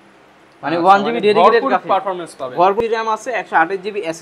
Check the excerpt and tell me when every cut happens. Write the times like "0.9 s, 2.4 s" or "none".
2.8 s